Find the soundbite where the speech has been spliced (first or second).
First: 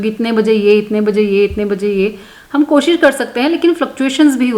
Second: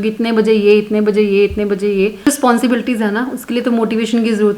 second